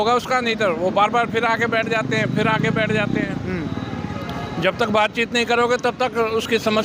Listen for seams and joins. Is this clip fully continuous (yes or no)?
yes